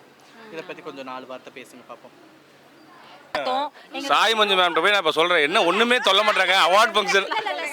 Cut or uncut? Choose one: cut